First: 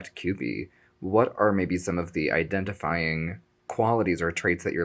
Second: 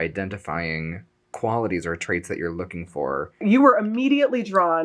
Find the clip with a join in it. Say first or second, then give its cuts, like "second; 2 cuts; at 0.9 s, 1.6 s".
second; 1 cut; at 3.4 s